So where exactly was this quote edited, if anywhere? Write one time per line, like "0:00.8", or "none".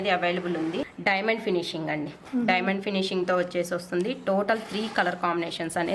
0:00.9